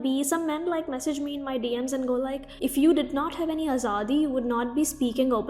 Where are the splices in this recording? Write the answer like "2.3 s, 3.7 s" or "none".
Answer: 2.4 s